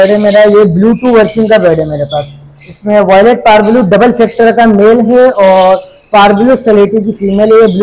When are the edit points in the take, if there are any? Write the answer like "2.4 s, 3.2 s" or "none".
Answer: none